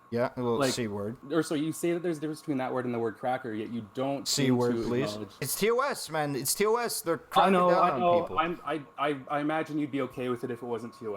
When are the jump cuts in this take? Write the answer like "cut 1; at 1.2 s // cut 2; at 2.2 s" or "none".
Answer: cut 1; at 1.2 s // cut 2; at 5.5 s